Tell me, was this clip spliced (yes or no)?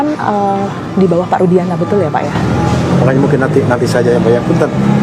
no